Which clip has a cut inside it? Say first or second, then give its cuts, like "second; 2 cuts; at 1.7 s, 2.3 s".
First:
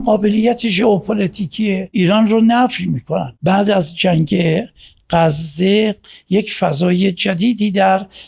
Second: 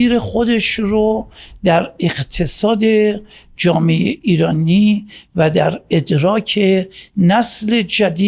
first; 2 cuts; at 1.9 s, 3.3 s